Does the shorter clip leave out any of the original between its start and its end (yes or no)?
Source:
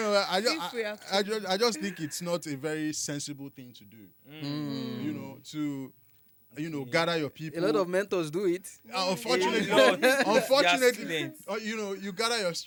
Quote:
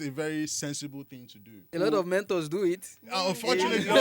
yes